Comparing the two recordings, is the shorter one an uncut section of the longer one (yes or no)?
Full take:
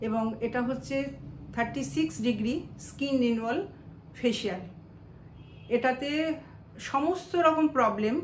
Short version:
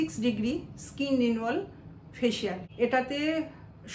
no